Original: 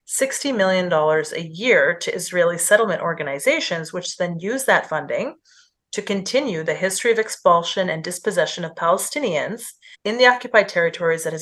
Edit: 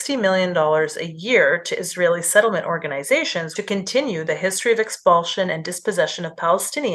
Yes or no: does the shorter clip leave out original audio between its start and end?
yes